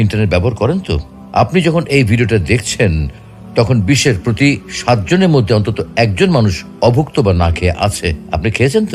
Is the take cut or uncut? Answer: uncut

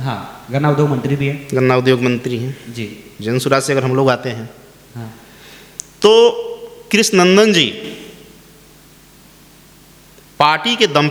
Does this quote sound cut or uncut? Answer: uncut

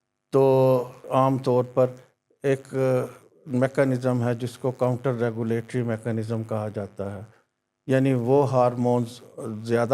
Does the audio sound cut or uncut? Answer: cut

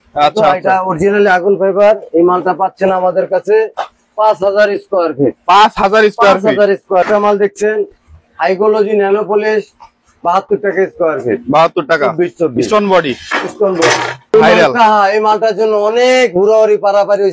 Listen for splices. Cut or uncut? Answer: cut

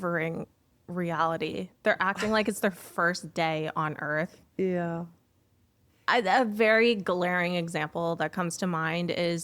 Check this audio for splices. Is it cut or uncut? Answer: uncut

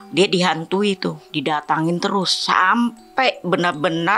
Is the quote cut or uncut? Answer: cut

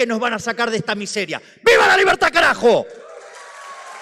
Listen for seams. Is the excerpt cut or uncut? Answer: uncut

